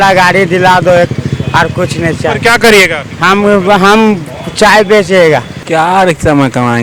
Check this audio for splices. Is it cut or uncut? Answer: cut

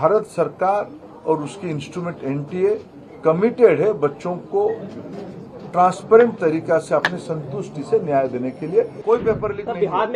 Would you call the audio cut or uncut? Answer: cut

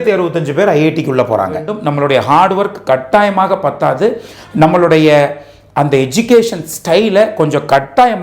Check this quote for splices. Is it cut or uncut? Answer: cut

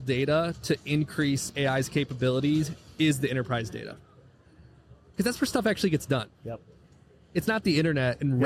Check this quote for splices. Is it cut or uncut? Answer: uncut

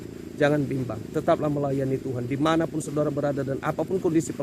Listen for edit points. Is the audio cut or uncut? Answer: uncut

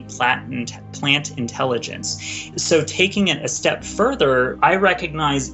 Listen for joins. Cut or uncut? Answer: cut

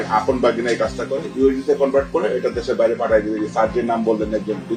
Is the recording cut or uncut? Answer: uncut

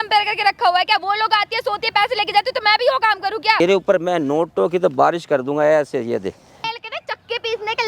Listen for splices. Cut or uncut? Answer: cut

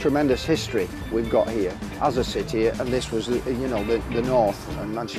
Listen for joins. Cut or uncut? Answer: uncut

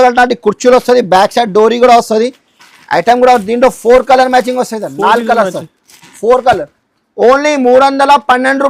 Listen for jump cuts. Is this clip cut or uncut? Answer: uncut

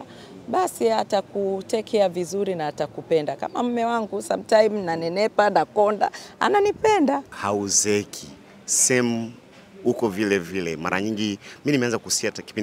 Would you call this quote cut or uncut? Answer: cut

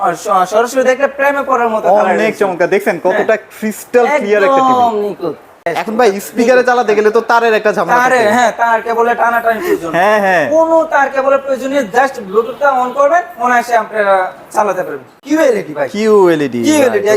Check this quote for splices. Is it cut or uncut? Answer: cut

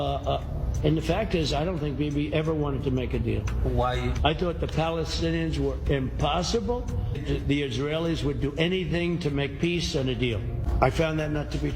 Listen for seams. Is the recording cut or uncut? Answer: cut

